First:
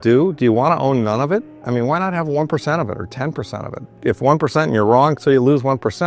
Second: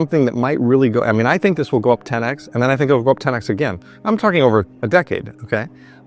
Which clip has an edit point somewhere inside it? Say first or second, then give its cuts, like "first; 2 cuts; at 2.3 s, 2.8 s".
first; 1 cut; at 4.0 s